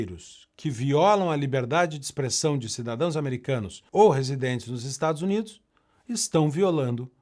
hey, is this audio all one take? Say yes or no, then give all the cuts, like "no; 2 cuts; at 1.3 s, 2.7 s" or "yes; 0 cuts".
no; 1 cut; at 3.8 s